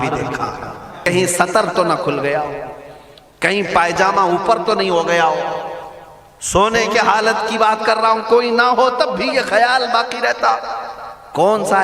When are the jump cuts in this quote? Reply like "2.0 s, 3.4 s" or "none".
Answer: 1.0 s